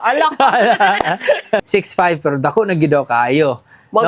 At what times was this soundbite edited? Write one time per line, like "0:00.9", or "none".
0:01.7